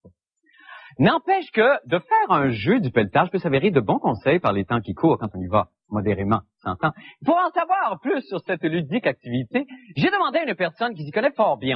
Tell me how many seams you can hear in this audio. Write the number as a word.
one